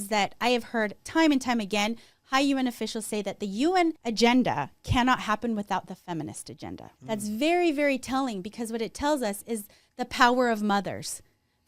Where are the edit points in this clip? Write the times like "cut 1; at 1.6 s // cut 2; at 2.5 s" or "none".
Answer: cut 1; at 1.0 s // cut 2; at 4.0 s // cut 3; at 6.9 s